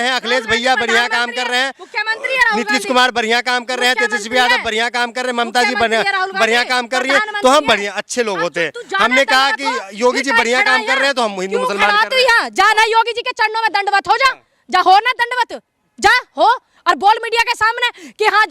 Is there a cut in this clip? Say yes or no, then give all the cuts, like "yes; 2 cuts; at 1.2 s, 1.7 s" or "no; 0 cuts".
no; 0 cuts